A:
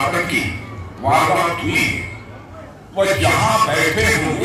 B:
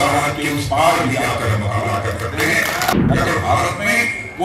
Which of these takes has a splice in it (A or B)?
B